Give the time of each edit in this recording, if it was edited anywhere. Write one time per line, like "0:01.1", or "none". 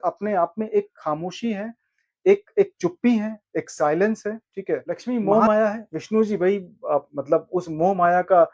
0:05.0